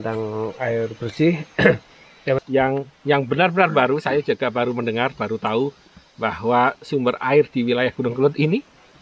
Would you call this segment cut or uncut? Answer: cut